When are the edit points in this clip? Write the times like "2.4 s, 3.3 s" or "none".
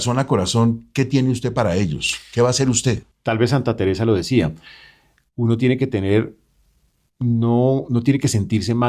3.0 s